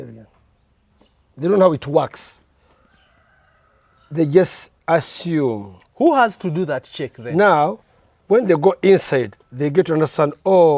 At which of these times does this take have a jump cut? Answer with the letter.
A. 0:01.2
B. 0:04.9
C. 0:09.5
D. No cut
D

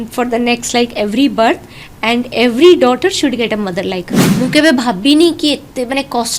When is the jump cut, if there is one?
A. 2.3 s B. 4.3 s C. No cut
B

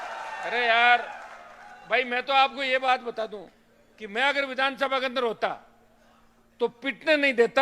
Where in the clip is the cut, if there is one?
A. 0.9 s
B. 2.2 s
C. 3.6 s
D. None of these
D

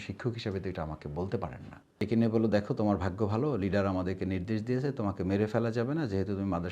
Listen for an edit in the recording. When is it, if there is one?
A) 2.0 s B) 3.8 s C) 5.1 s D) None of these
A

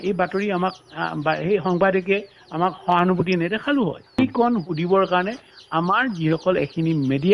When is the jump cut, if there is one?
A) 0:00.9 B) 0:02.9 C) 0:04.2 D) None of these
C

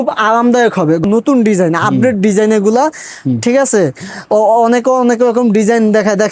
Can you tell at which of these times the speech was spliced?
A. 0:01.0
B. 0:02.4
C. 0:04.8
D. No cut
A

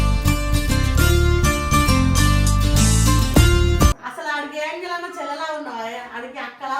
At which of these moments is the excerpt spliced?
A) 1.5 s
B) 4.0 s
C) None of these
B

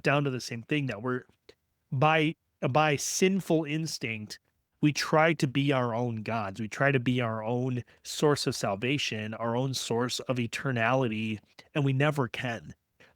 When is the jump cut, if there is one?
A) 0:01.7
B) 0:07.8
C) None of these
C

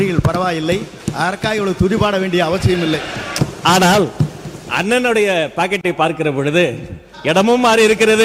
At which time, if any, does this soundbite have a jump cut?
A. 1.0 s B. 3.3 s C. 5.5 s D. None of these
B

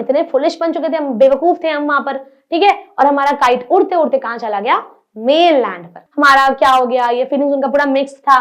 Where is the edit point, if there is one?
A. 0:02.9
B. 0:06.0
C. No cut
B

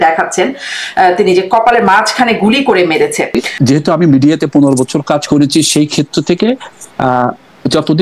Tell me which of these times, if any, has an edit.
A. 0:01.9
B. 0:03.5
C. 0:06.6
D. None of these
B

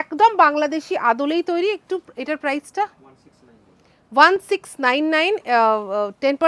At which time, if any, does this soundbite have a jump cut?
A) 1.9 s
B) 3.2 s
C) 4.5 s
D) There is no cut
D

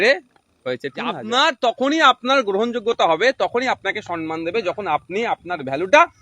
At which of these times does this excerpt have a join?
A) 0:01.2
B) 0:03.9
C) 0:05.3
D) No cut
A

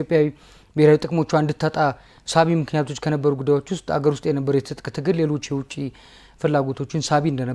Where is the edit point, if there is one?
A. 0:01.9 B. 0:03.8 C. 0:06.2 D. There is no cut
D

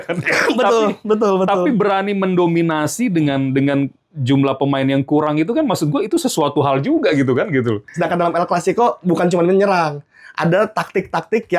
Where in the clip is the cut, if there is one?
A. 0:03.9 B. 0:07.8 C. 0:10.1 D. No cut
B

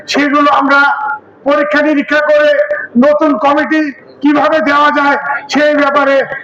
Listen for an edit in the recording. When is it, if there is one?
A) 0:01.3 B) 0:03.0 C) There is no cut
C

